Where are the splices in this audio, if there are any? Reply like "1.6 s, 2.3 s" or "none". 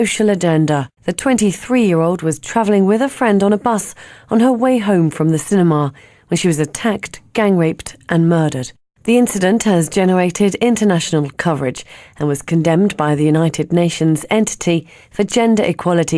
none

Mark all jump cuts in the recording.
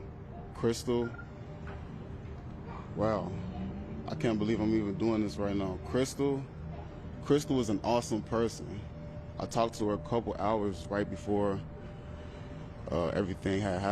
none

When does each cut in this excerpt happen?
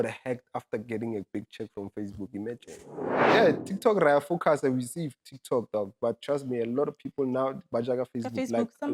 3.2 s

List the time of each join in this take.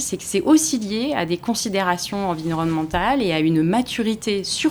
none

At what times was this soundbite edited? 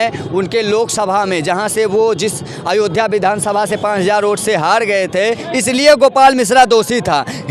5.4 s

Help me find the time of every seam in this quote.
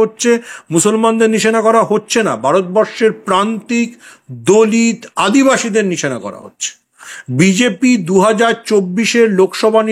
none

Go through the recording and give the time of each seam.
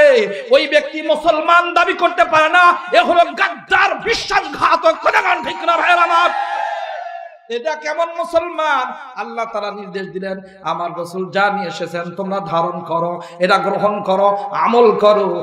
none

